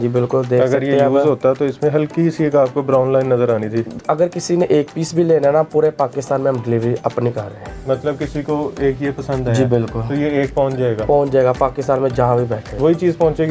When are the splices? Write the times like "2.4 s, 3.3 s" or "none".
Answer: 3.9 s, 12.7 s